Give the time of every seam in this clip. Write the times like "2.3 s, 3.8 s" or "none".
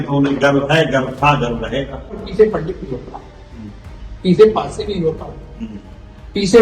2.2 s